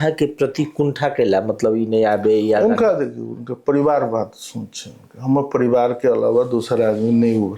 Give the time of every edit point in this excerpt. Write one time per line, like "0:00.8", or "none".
none